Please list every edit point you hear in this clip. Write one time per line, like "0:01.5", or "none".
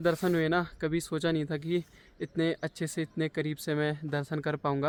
none